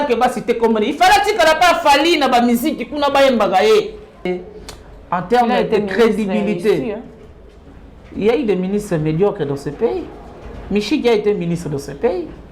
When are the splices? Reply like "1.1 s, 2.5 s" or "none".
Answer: 4.3 s